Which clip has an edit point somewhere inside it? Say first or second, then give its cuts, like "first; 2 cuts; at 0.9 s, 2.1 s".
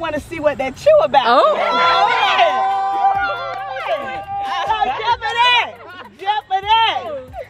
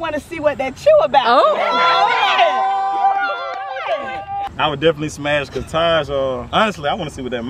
second; 2 cuts; at 4.5 s, 6.4 s